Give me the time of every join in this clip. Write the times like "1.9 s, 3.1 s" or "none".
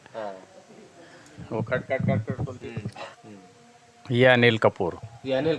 3.1 s

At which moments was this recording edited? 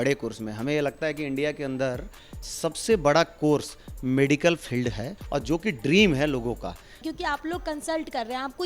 5.1 s, 7.0 s

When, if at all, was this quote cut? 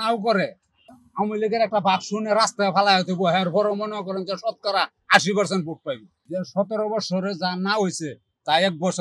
1.0 s, 6.1 s

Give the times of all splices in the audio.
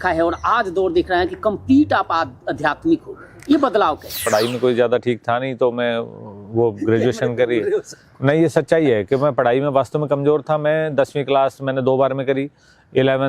4.2 s

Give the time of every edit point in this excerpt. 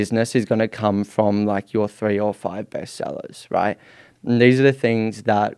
none

